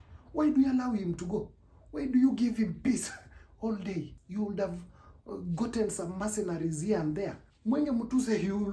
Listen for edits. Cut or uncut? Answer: cut